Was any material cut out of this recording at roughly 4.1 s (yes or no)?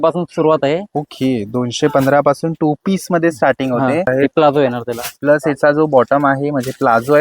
yes